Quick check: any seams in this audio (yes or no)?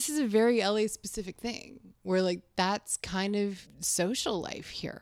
yes